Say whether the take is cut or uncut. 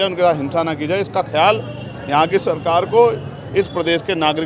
uncut